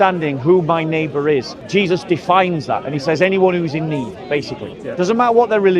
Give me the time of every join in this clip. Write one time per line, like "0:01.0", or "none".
0:01.6
0:04.8